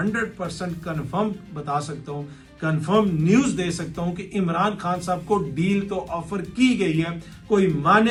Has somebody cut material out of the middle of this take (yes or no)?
no